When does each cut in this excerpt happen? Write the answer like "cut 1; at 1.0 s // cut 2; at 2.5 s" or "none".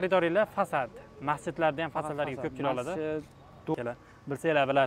cut 1; at 3.7 s